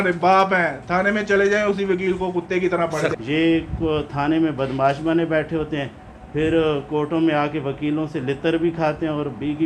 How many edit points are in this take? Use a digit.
1